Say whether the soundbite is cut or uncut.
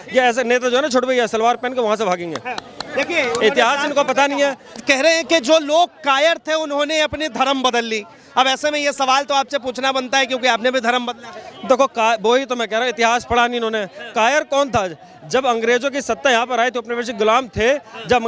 cut